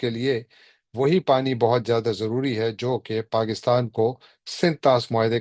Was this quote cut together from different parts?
no; 0 cuts

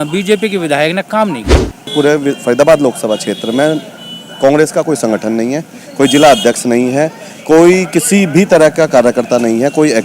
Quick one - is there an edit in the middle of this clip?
yes; 1 cut; at 1.9 s

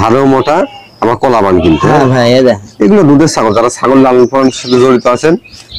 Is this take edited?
no; 0 cuts

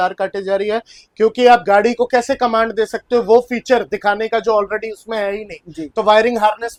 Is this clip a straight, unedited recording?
yes; 0 cuts

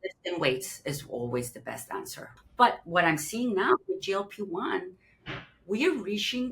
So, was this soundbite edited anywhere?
yes; 1 cut; at 2.2 s

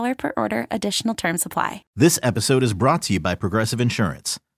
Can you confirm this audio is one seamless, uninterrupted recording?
no; 1 cut; at 1.8 s

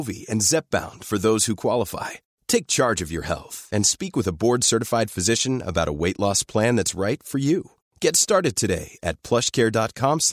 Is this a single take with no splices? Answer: yes; 0 cuts

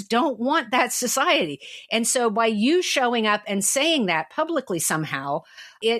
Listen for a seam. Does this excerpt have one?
no; 0 cuts

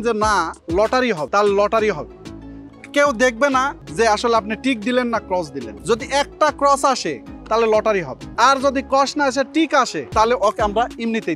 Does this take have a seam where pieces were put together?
yes; 5 cuts; at 1.2 s, 3.8 s, 5.7 s, 8.2 s, 10.0 s

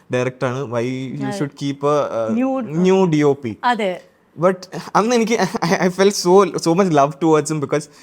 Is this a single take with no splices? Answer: yes; 0 cuts

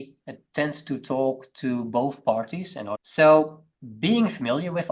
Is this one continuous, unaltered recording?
no; 2 cuts; at 3.0 s, 3.7 s

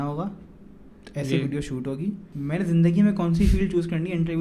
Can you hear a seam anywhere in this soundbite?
yes; 1 cut; at 2.3 s

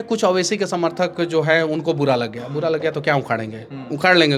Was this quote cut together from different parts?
no; 0 cuts

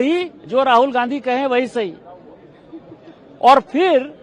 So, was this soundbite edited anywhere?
no; 0 cuts

